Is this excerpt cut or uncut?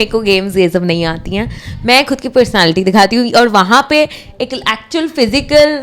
uncut